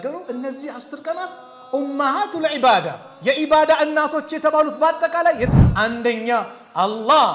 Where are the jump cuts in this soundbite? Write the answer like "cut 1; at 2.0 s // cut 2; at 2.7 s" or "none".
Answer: cut 1; at 5.5 s